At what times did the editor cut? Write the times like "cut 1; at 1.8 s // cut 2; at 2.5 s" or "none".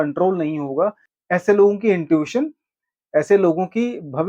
cut 1; at 1.1 s

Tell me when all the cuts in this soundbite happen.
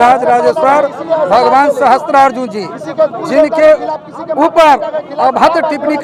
none

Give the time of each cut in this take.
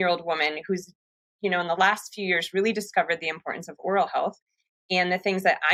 none

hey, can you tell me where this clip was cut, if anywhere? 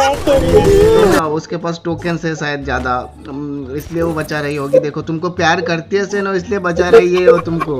cut 1; at 1.2 s

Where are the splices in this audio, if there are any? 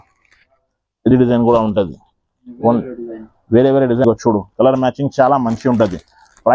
cut 1; at 4.0 s

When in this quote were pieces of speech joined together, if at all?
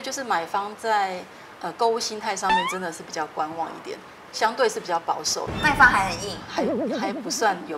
cut 1; at 5.5 s

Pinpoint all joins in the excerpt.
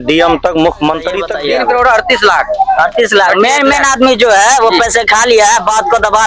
cut 1; at 1.3 s

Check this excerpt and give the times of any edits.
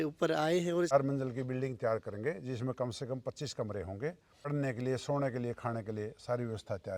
cut 1; at 0.9 s // cut 2; at 4.5 s

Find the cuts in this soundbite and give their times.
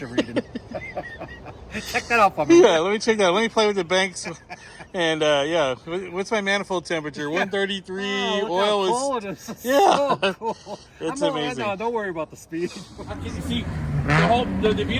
cut 1; at 13.1 s

